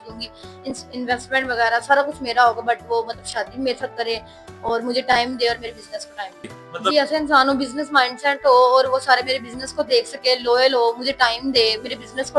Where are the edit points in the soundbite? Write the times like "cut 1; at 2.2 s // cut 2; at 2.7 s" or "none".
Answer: cut 1; at 6.9 s